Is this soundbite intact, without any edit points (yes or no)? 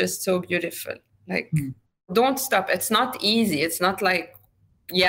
no